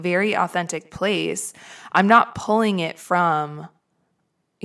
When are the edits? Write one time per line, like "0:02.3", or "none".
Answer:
none